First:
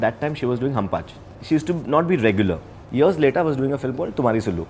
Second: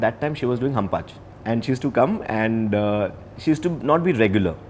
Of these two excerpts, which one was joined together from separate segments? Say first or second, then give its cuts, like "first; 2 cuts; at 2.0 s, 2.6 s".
first; 2 cuts; at 1.3 s, 2.7 s